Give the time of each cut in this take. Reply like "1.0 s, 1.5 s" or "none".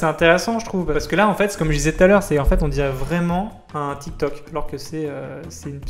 none